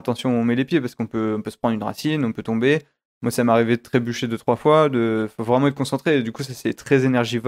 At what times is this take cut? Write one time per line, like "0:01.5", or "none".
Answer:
none